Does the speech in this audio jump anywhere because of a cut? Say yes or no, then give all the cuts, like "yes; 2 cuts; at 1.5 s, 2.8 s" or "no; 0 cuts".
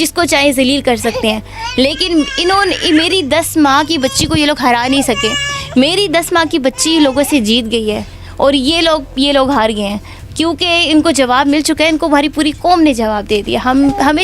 no; 0 cuts